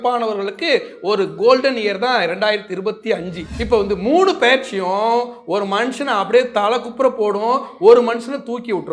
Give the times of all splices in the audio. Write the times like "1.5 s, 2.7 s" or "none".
3.4 s